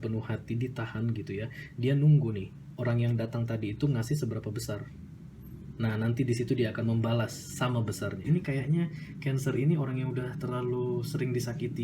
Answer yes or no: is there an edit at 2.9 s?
no